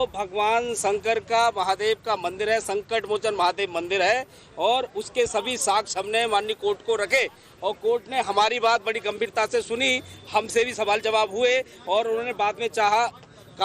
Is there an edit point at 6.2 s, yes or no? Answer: no